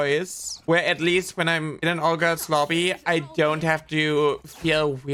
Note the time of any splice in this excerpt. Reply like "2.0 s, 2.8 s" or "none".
none